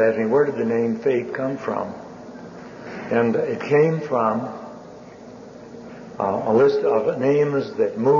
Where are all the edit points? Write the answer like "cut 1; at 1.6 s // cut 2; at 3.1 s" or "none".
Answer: none